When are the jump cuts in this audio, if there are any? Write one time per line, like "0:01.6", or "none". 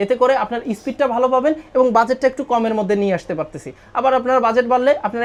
none